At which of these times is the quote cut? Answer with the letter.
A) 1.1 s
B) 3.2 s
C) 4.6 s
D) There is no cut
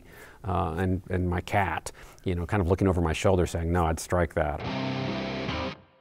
C